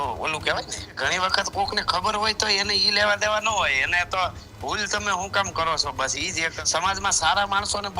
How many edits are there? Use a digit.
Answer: 2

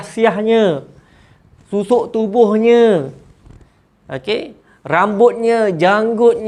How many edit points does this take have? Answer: 0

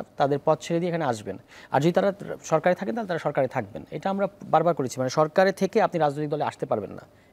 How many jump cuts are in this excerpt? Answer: 0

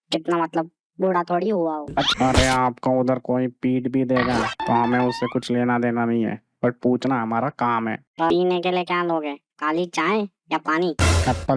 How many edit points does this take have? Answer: 2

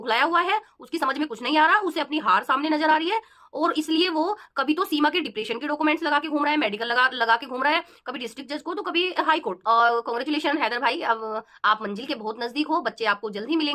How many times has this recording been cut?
1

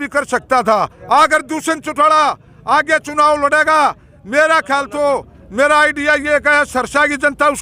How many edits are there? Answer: 1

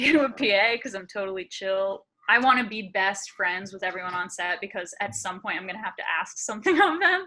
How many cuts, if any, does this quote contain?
1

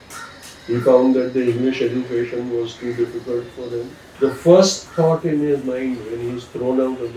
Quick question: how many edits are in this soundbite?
1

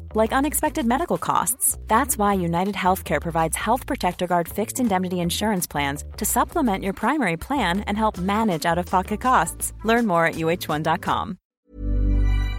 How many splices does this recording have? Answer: 1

